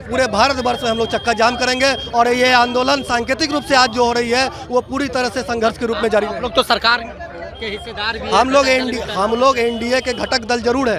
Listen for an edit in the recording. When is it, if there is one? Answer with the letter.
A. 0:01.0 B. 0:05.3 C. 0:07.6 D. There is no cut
D